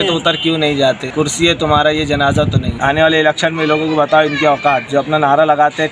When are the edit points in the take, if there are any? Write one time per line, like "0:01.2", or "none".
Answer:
0:01.1
0:02.7